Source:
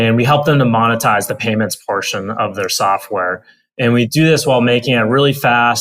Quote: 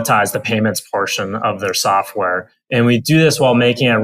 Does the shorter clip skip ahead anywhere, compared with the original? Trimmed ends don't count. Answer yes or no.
yes